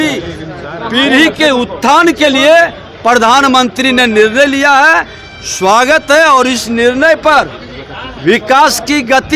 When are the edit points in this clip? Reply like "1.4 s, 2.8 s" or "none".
none